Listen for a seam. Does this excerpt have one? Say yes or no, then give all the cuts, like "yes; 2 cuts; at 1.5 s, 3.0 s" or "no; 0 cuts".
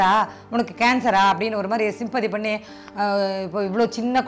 no; 0 cuts